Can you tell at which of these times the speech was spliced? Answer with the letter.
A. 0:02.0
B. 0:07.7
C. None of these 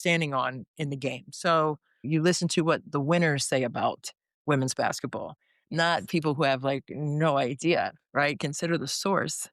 A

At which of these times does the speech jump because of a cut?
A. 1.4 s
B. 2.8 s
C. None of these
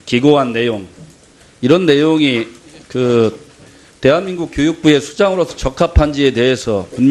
C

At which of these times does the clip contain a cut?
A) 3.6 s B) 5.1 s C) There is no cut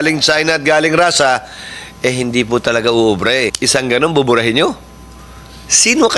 A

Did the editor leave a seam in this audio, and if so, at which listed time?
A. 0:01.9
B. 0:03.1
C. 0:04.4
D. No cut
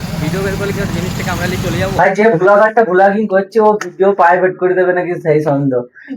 A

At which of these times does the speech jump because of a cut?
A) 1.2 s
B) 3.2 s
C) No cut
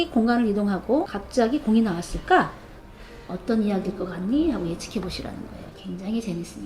A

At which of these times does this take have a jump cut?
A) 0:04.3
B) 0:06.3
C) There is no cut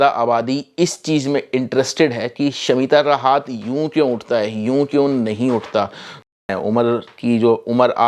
B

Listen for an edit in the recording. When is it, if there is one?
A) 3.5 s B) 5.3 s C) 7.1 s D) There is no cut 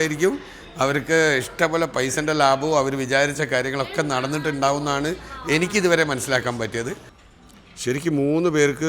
C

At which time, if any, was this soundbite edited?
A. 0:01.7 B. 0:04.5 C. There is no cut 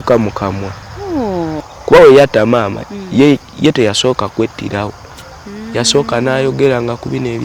A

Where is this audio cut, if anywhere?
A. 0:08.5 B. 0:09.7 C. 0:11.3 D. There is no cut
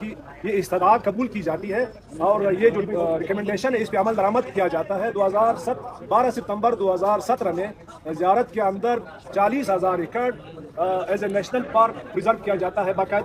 D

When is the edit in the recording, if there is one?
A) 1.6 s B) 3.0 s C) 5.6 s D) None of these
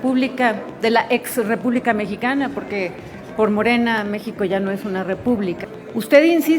C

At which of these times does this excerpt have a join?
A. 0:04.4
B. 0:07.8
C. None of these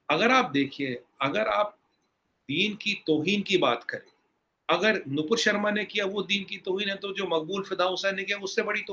C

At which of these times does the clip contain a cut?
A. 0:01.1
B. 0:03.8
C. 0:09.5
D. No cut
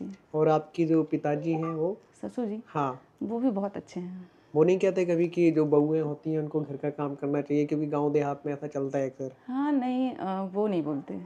D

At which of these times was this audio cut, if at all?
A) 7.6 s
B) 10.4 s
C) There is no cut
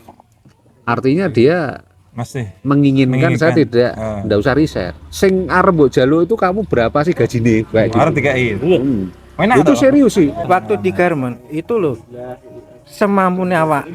B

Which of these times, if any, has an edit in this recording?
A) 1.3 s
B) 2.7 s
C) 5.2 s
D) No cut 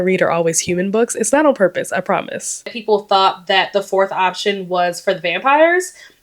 B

